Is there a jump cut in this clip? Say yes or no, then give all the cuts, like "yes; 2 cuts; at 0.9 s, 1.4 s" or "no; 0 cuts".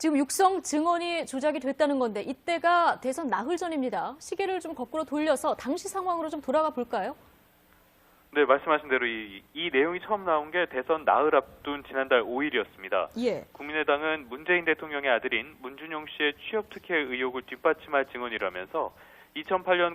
yes; 1 cut; at 17.3 s